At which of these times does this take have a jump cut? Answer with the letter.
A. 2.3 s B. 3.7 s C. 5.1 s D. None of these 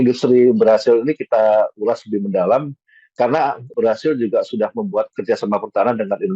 B